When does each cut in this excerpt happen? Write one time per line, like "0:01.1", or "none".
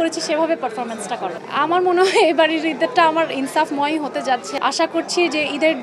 0:04.5